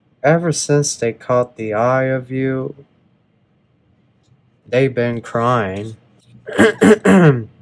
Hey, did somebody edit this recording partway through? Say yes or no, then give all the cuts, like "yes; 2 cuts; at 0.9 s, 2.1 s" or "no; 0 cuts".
no; 0 cuts